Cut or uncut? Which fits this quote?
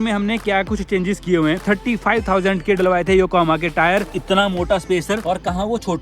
cut